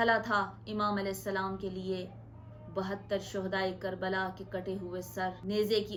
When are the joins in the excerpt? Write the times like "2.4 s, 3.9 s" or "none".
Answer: none

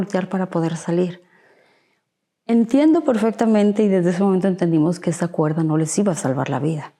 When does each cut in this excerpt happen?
none

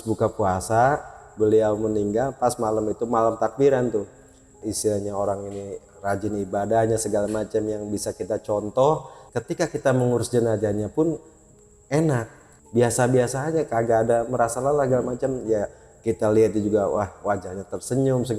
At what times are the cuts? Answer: 4.6 s, 9.3 s, 12.5 s

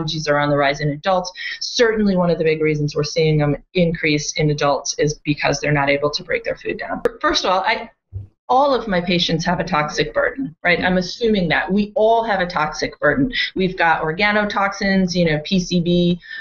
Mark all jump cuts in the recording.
7.1 s

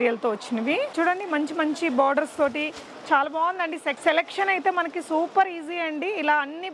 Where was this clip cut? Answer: 0.9 s, 3.9 s

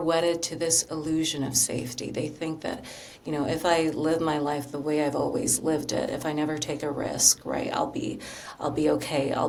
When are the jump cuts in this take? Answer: none

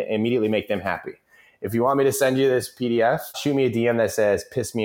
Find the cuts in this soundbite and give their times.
3.4 s

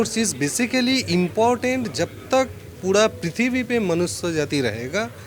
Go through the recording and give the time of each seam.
none

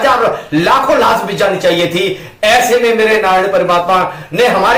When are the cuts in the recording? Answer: none

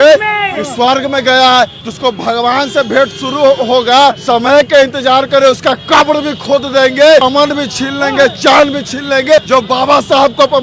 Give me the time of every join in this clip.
1.8 s, 4.2 s, 7.2 s, 9.4 s

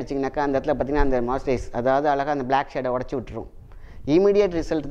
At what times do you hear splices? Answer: none

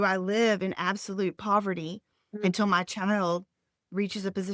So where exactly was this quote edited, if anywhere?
none

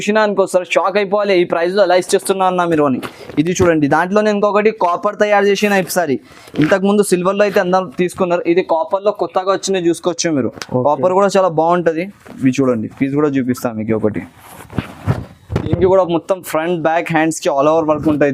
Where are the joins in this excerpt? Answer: none

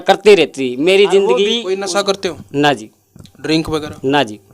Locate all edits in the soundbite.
1.5 s

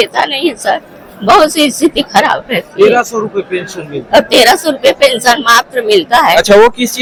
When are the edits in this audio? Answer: none

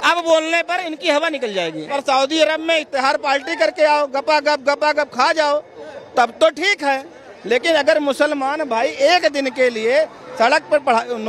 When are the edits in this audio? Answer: 1.9 s

